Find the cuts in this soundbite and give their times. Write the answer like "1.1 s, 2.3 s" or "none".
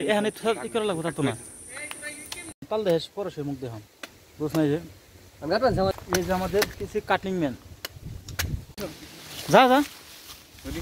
2.6 s, 5.9 s, 8.7 s

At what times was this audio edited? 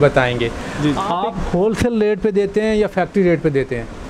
1.0 s

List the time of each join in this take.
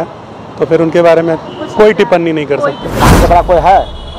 3.0 s

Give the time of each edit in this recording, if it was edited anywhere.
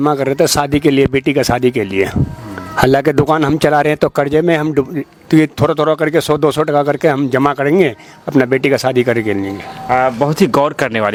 none

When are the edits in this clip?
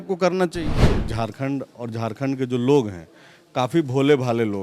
0.9 s

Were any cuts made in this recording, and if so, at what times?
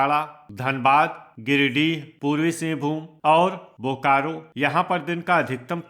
2.1 s, 3.1 s, 4.4 s

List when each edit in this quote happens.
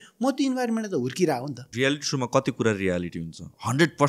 1.6 s

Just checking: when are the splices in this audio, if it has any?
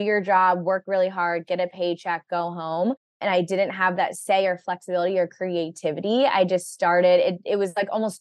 3.2 s

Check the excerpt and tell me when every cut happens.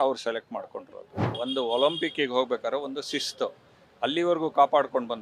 1.2 s

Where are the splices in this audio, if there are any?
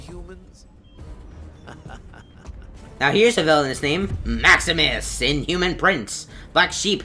5.1 s

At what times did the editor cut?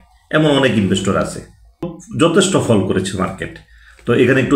2.0 s

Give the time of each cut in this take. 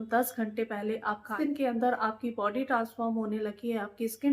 1.3 s

